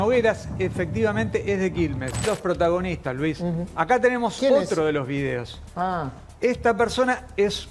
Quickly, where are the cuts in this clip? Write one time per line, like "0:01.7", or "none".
0:02.3